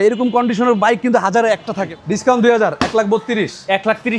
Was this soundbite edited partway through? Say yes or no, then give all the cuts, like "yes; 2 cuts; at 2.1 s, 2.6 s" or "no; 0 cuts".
yes; 1 cut; at 1.9 s